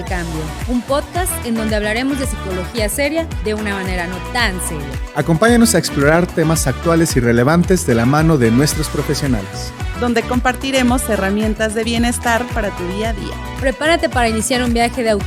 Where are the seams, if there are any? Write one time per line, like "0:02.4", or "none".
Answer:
none